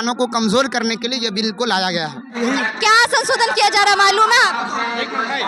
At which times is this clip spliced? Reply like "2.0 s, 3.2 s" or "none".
2.2 s